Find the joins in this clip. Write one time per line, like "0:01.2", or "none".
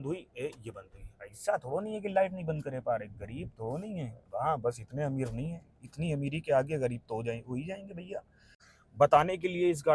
0:08.7

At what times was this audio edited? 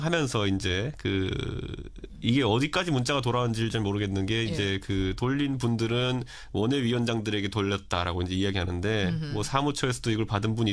0:09.5

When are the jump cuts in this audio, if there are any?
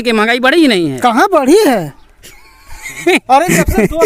none

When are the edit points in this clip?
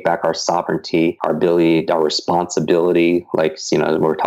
0:01.2

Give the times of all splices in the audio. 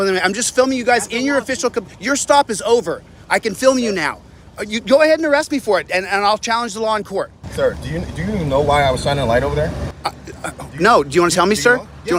none

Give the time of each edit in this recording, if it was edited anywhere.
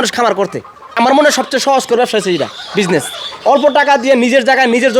0:01.0

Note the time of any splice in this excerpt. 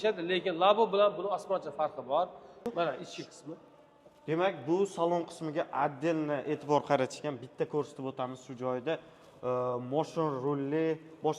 0:02.6

